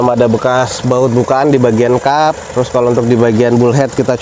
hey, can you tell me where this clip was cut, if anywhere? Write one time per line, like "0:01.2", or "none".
none